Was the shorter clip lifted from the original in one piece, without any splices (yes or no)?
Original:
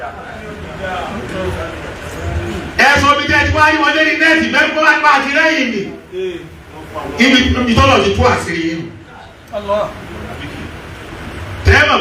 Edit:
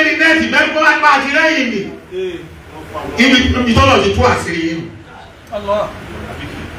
yes